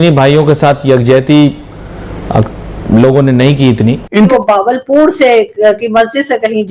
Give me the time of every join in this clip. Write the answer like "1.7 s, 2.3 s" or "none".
4.2 s